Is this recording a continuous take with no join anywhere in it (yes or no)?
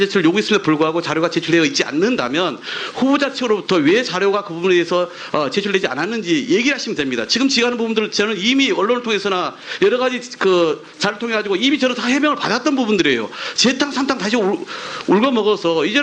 no